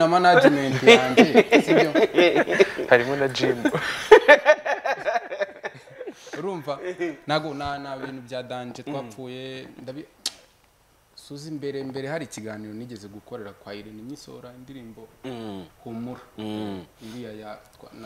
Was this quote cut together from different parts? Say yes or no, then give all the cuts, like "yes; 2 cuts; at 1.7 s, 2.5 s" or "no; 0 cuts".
no; 0 cuts